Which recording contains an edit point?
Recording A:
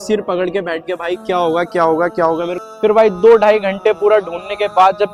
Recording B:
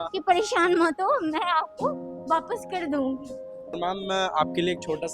B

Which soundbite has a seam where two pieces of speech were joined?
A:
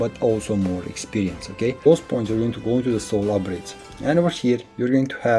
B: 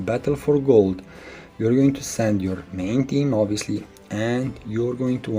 A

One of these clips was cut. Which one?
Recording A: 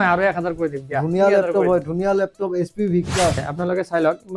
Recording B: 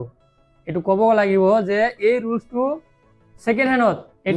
A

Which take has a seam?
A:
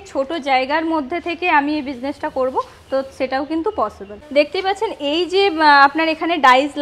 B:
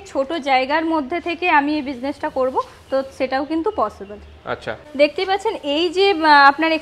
A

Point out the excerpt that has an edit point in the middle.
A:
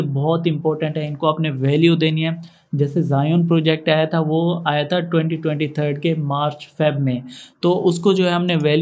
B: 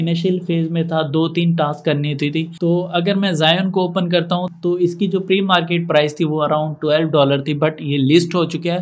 B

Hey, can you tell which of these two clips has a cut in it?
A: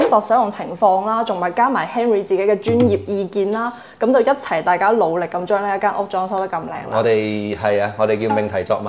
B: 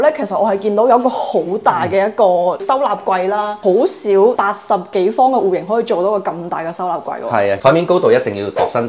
B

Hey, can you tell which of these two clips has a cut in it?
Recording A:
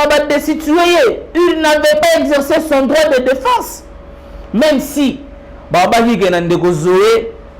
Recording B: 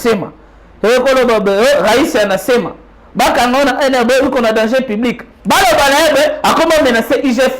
B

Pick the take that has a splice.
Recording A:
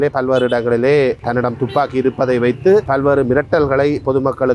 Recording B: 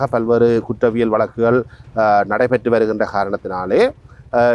A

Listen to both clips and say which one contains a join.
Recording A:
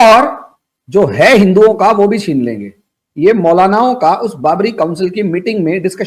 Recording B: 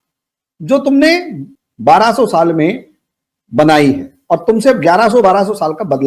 B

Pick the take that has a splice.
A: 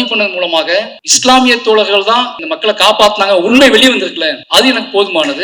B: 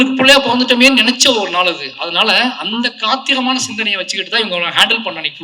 A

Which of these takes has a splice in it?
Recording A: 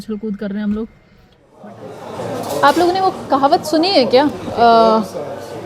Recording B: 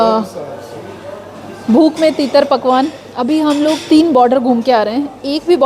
A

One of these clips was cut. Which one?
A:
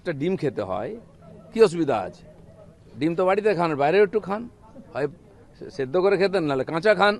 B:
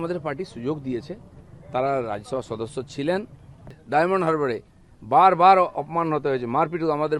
B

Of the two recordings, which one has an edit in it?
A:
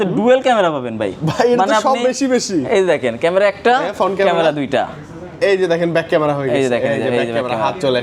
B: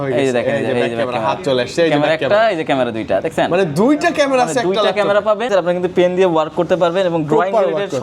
B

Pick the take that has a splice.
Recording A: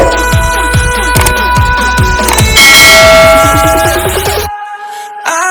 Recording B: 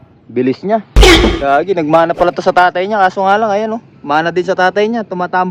B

